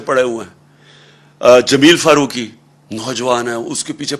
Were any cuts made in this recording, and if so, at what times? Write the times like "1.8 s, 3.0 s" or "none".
none